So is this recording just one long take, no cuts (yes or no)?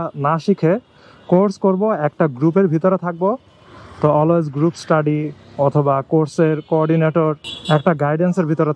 yes